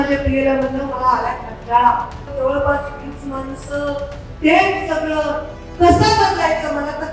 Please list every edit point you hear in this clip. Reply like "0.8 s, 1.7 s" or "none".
2.2 s